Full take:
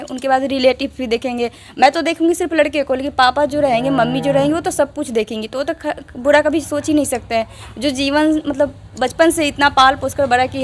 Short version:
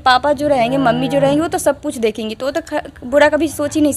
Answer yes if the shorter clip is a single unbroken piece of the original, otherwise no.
yes